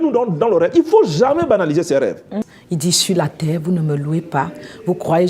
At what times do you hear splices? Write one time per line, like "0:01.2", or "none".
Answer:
0:02.5

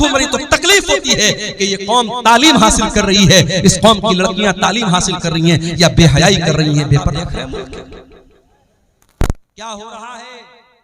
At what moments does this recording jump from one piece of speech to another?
0:07.1

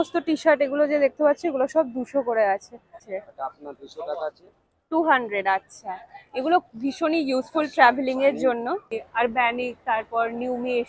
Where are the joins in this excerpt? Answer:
0:03.2
0:08.9

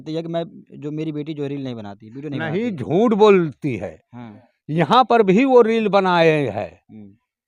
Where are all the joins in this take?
none

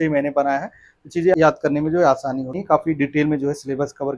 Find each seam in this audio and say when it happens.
0:01.3
0:02.6

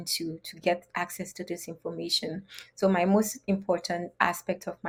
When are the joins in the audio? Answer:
none

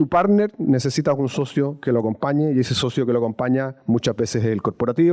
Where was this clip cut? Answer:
none

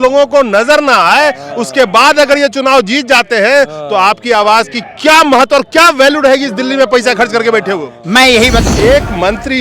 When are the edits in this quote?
0:08.6

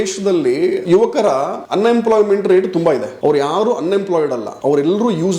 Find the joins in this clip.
0:00.8
0:01.6
0:03.1
0:04.5

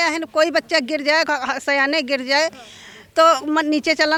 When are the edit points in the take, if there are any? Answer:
none

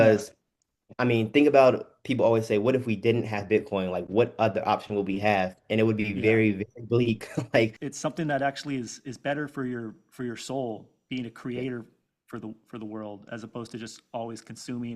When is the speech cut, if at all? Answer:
0:07.8

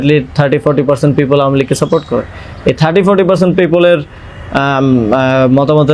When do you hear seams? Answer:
none

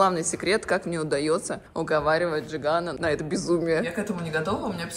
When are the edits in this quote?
0:01.6
0:02.9
0:03.9

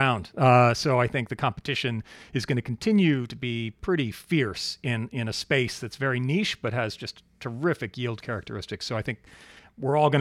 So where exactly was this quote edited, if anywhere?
none

